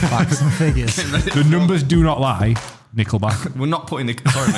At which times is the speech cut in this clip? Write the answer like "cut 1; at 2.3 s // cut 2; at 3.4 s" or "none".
cut 1; at 3.4 s